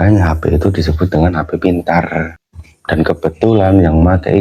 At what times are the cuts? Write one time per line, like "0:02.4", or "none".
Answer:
0:02.4